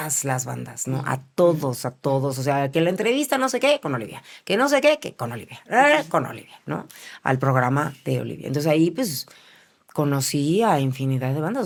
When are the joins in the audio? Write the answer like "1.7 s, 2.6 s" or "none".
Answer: none